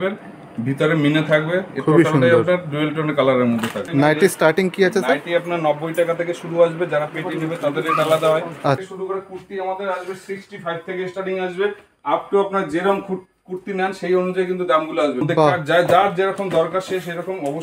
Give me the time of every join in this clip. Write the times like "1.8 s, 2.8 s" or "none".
3.8 s, 8.8 s, 15.2 s